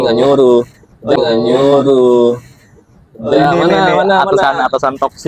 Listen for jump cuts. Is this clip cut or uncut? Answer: uncut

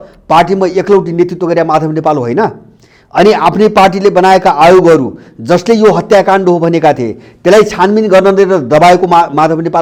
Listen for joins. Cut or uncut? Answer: uncut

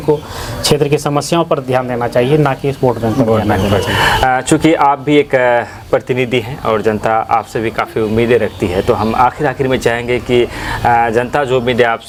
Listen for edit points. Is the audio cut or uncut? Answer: uncut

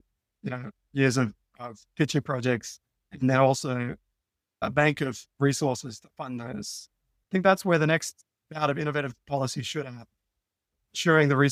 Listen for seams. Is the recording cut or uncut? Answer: uncut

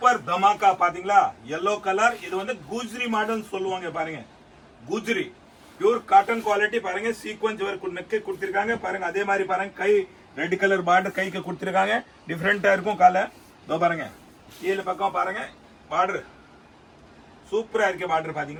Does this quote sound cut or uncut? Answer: uncut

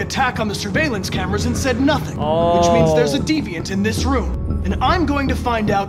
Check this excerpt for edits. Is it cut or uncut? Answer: cut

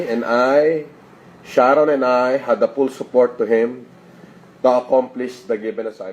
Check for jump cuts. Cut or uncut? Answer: cut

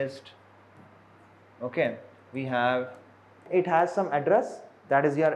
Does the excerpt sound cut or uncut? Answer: cut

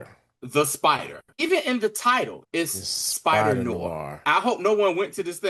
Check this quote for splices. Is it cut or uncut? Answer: cut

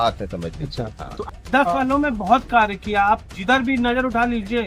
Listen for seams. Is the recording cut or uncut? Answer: cut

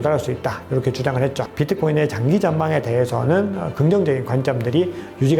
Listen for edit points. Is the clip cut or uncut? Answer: cut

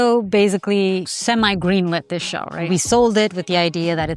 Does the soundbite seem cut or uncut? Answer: cut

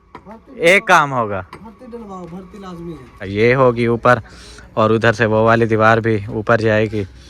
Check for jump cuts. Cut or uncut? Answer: cut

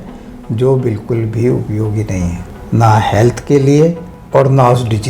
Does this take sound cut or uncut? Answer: cut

